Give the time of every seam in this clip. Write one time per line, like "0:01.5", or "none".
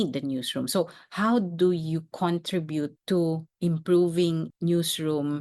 0:03.0
0:04.5